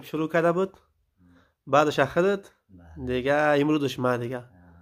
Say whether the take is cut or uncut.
uncut